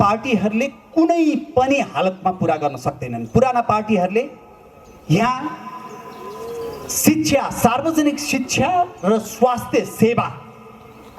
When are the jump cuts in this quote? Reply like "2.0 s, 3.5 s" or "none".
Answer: none